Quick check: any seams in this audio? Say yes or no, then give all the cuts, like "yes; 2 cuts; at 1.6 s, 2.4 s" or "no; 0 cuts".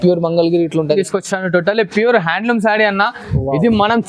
yes; 1 cut; at 1.0 s